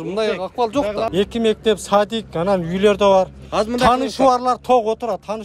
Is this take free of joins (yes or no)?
no